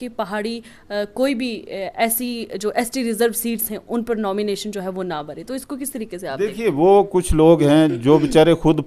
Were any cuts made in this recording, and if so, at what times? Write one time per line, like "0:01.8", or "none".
none